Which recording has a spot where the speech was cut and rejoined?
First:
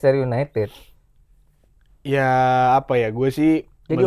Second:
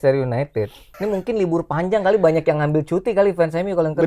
second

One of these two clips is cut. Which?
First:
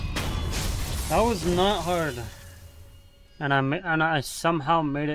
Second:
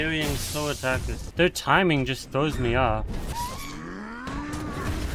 second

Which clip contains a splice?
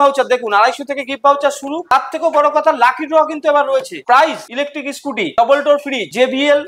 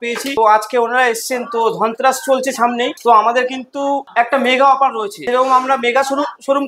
first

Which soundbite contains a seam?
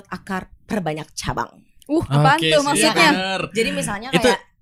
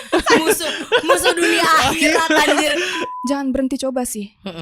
second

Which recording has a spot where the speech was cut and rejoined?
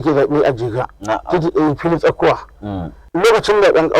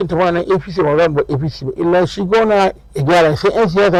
first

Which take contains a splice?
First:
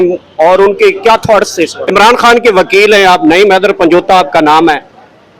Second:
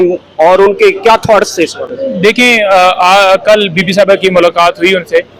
first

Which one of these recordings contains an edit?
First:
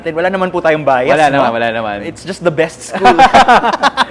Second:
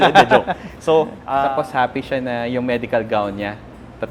second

